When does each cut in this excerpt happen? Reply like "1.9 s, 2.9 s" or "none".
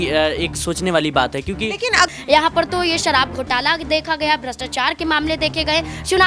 2.1 s